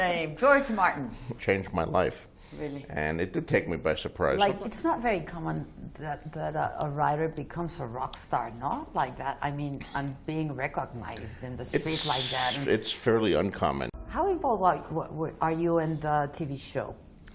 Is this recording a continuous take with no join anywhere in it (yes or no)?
no